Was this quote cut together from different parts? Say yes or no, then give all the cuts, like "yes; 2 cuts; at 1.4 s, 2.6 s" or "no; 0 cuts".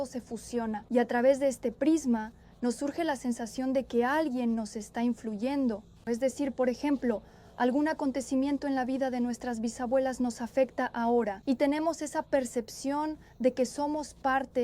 yes; 2 cuts; at 0.8 s, 11.4 s